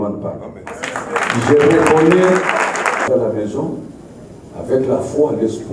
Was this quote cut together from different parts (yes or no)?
yes